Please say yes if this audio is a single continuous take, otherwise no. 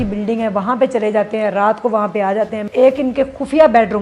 no